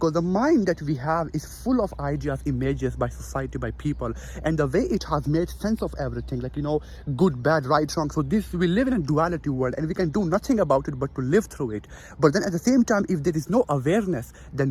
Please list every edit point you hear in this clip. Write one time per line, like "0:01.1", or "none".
none